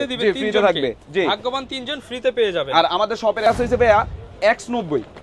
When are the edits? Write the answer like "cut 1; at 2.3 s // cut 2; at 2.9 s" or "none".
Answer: cut 1; at 3.5 s